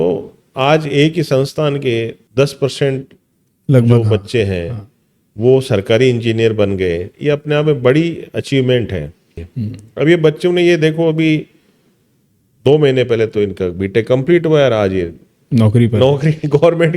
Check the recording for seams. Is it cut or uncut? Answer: cut